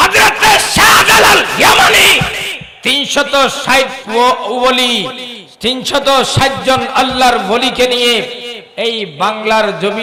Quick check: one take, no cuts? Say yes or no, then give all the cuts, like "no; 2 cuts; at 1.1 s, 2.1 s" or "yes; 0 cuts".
yes; 0 cuts